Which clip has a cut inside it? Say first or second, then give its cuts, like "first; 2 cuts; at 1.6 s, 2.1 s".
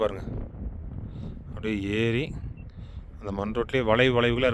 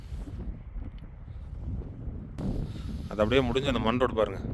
second; 1 cut; at 2.4 s